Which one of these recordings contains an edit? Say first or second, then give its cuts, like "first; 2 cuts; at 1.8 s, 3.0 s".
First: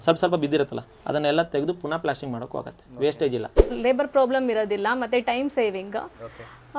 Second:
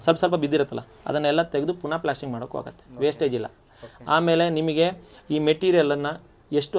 first; 1 cut; at 3.8 s